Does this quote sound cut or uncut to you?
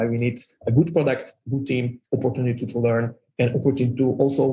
uncut